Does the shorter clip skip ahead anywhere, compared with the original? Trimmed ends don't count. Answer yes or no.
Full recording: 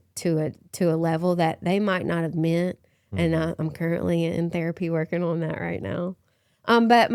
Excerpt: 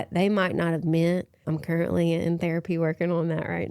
yes